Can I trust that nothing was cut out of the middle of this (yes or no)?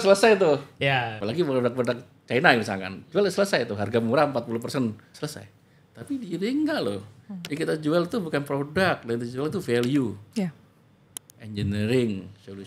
no